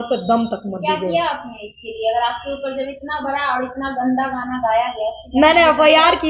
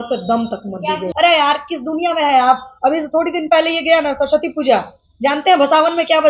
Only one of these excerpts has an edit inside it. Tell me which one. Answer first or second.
second